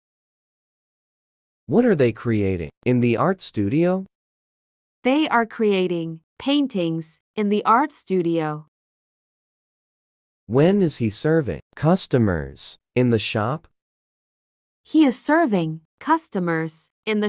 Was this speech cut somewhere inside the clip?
no; 0 cuts

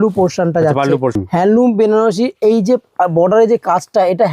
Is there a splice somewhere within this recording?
yes; 1 cut; at 1.2 s

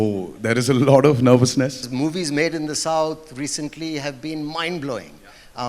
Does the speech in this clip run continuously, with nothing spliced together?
no; 1 cut; at 1.8 s

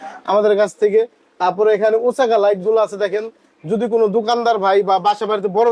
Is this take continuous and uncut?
yes; 0 cuts

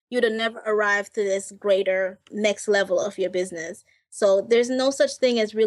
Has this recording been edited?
yes; 1 cut; at 2.3 s

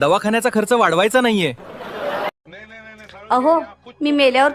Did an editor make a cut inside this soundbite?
yes; 1 cut; at 2.4 s

